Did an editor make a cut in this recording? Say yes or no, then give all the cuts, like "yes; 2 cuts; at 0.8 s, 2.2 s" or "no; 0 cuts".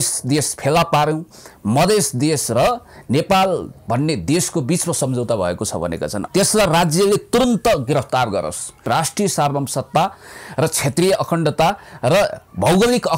yes; 2 cuts; at 6.2 s, 8.9 s